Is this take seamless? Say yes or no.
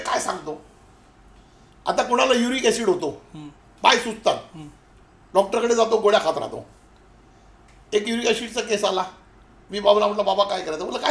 yes